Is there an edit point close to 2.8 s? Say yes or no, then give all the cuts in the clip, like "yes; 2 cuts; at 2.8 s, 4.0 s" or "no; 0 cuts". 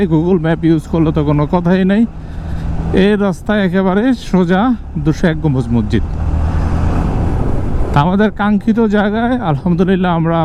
no; 0 cuts